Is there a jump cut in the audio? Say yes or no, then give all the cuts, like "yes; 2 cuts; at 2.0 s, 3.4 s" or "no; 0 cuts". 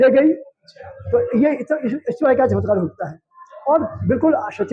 no; 0 cuts